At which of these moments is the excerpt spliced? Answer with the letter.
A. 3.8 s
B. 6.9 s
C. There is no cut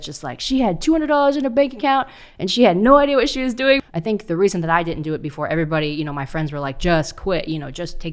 A